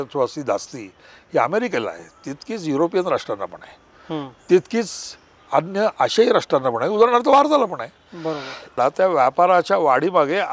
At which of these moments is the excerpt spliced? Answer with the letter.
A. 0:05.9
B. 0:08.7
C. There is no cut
B